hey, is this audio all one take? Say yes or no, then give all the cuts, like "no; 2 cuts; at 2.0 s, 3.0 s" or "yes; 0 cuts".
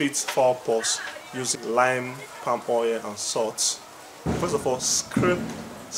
no; 1 cut; at 1.5 s